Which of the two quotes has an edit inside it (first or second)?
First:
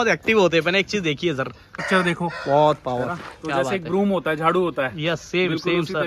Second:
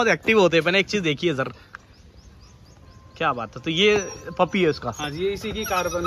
first